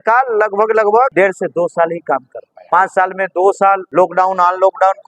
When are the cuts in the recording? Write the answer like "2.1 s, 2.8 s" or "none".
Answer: 1.1 s, 2.5 s, 3.8 s